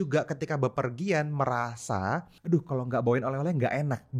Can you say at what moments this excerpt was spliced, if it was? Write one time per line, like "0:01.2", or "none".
0:02.3

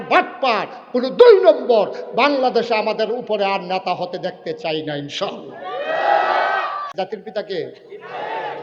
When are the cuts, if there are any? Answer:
0:06.9

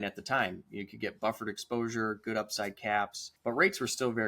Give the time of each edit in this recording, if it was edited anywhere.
0:03.2

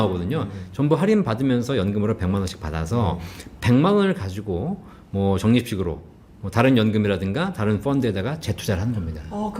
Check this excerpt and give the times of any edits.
none

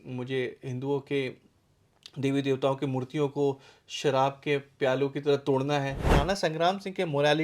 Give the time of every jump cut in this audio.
0:06.1

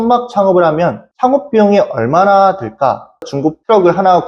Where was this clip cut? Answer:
0:03.3

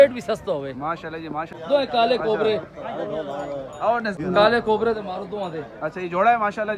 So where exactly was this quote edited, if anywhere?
0:01.5
0:04.2

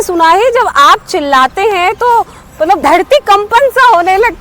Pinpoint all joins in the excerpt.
0:02.8

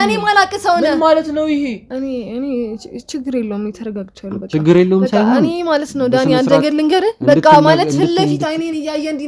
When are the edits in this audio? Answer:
0:01.8

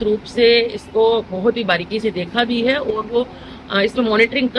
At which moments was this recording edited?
none

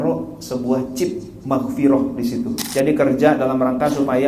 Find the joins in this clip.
0:02.6

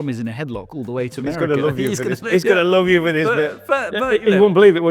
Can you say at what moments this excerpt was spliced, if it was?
none

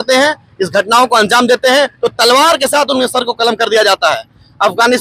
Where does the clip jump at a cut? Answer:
none

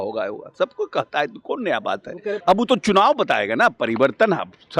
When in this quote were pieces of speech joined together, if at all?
0:02.4

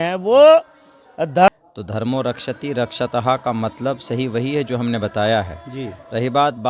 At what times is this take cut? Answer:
0:01.5

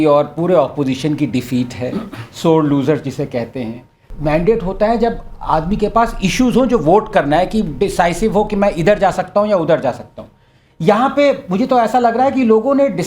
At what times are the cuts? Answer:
0:04.1

